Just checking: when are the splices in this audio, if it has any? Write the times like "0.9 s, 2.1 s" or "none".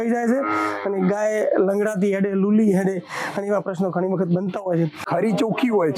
5.0 s